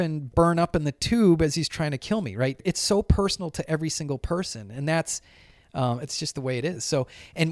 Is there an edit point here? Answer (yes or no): yes